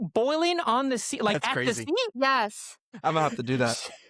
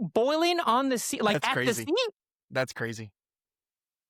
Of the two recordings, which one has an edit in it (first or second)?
first